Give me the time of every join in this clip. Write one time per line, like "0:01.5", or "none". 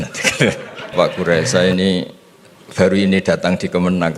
0:00.9